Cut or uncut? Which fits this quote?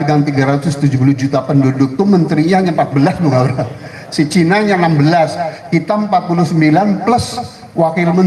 uncut